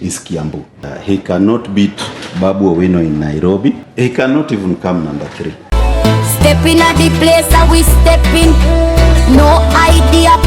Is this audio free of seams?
no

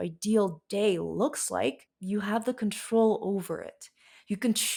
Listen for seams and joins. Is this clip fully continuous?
yes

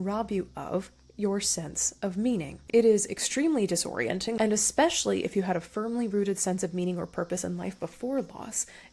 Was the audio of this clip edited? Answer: yes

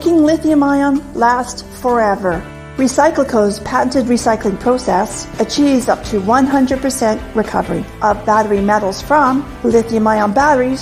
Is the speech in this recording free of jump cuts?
no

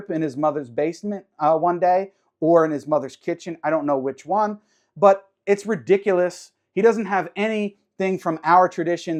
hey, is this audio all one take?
yes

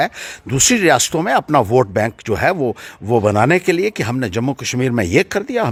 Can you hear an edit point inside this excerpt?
no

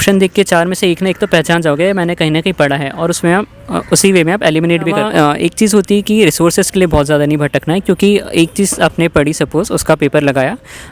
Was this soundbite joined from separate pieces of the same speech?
yes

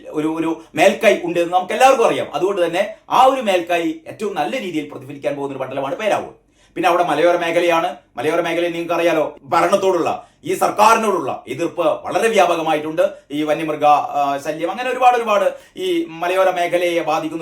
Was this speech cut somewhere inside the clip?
yes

